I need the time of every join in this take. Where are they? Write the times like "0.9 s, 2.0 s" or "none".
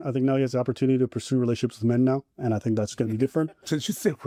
none